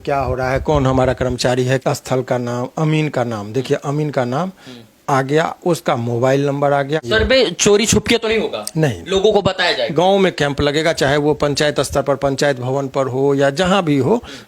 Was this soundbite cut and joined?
yes; 3 cuts; at 1.8 s, 7.0 s, 9.9 s

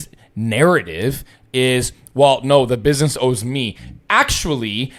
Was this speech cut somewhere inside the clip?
no; 0 cuts

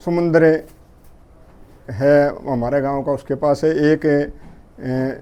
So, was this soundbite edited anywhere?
no; 0 cuts

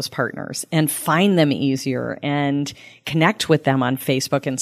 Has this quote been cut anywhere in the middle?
no; 0 cuts

